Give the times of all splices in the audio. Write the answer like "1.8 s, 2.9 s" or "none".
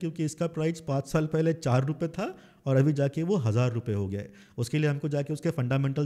none

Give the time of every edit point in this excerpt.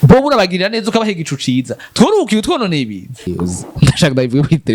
3.3 s

